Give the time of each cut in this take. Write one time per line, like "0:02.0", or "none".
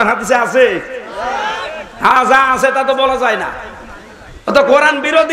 none

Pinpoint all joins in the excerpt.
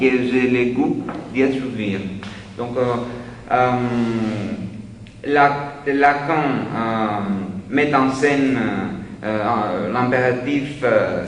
0:09.7

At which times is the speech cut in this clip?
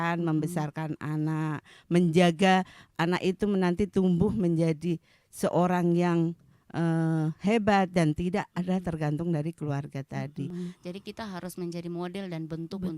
0:10.5

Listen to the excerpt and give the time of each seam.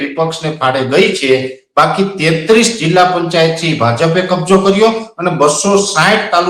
none

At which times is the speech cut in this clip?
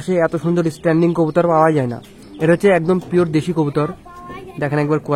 none

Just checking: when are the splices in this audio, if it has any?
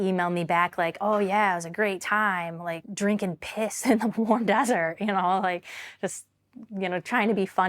0:02.9

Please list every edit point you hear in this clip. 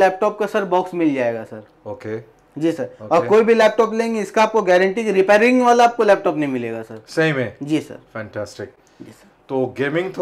none

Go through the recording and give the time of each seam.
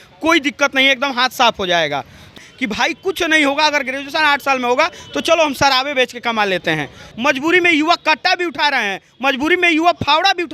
0:02.3
0:07.0

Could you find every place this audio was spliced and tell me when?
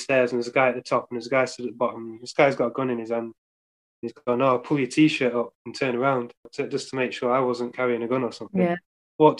0:06.4

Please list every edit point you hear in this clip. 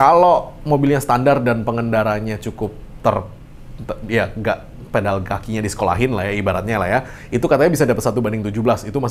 none

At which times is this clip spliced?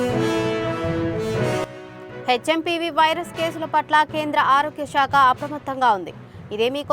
0:01.6

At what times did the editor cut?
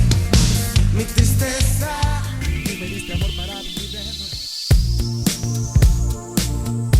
0:02.5

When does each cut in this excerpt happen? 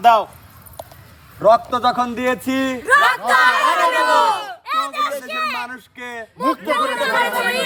none

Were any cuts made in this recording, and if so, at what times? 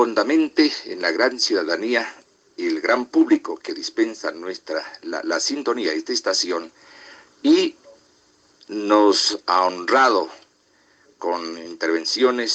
none

